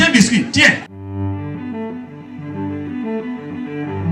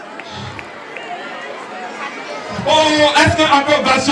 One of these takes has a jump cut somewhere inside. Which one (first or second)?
first